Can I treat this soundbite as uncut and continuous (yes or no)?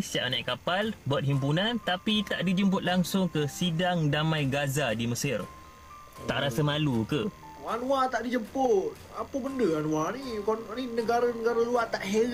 no